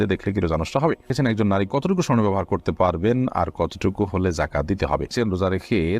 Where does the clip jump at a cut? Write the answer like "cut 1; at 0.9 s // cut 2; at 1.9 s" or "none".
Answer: cut 1; at 1.1 s // cut 2; at 5.1 s